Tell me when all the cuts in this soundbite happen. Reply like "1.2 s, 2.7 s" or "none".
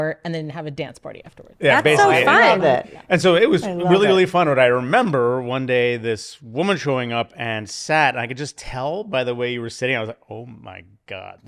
none